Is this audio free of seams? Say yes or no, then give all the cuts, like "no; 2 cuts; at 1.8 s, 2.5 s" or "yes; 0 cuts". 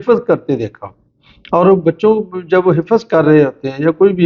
yes; 0 cuts